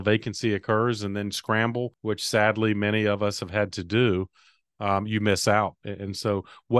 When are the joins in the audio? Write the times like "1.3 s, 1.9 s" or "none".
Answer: 1.9 s